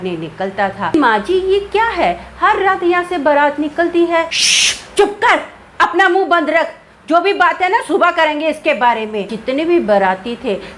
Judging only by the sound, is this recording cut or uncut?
cut